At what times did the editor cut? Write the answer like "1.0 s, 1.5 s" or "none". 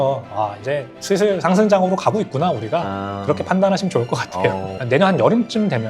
4.8 s